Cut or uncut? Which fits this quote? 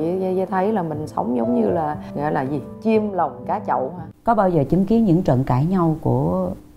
cut